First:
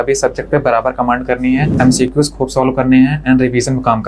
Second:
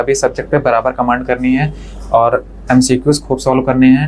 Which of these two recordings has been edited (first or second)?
first